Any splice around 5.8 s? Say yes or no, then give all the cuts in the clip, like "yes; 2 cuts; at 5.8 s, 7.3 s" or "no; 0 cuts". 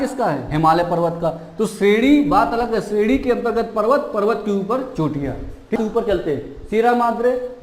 yes; 1 cut; at 5.8 s